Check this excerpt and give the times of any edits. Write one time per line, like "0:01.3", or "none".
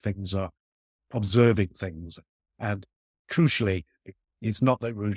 0:01.0
0:04.2